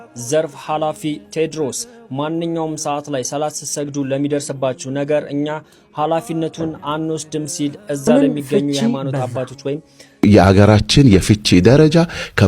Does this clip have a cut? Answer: yes; 1 cut; at 10.0 s

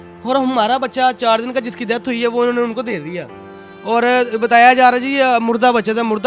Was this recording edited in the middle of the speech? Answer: no; 0 cuts

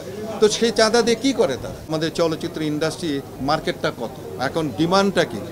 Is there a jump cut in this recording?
yes; 3 cuts; at 1.9 s, 3.4 s, 4.3 s

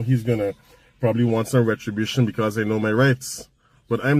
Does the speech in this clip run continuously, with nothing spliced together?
yes; 0 cuts

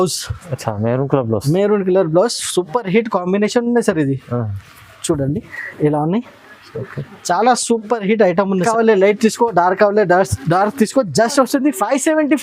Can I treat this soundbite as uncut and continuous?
no; 1 cut; at 8.6 s

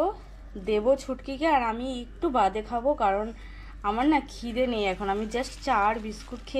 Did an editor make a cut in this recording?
no; 0 cuts

